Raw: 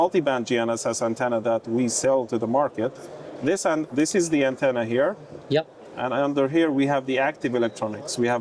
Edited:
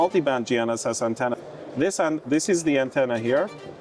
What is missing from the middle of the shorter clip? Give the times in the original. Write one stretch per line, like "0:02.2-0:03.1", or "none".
0:01.4-0:03.0